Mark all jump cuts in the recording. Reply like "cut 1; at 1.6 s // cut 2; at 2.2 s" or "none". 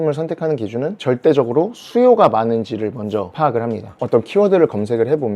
cut 1; at 3.9 s